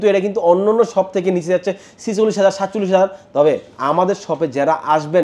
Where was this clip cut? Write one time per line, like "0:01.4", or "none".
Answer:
none